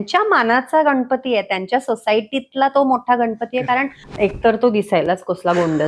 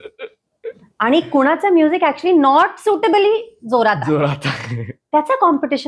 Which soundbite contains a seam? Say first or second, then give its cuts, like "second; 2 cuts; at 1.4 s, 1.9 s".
first; 1 cut; at 4.0 s